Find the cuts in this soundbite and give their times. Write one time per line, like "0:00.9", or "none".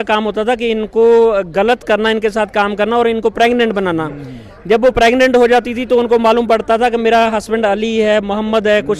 none

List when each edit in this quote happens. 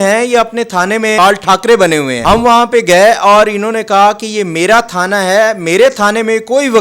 0:01.2
0:02.1

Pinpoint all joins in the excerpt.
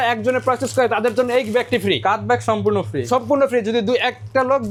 none

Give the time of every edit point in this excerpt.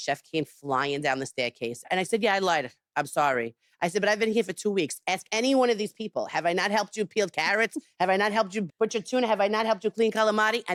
none

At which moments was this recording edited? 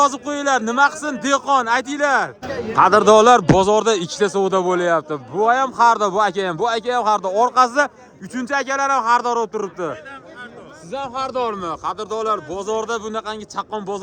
0:02.4

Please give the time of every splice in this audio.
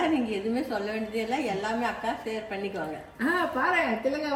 none

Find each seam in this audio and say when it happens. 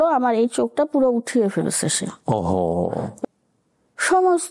0:03.1

